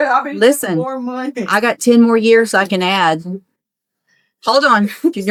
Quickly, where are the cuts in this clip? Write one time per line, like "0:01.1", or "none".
none